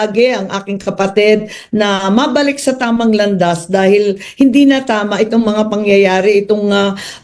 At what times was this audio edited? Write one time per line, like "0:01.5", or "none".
0:03.6